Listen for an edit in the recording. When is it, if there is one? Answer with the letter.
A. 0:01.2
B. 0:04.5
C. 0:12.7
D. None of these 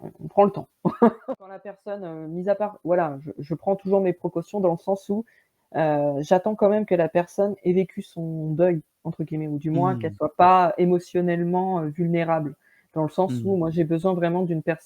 A